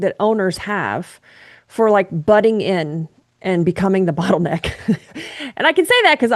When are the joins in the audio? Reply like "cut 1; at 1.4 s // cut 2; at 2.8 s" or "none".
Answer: none